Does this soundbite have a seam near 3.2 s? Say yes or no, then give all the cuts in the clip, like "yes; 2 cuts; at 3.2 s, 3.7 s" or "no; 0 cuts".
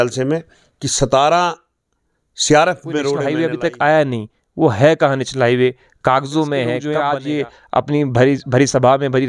yes; 2 cuts; at 3.2 s, 6.8 s